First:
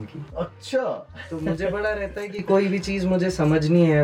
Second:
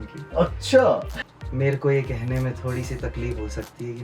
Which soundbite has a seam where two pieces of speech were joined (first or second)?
second